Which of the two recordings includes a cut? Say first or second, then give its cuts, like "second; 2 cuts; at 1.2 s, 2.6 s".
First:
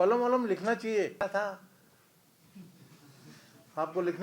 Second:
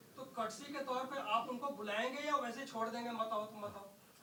first; 1 cut; at 1.3 s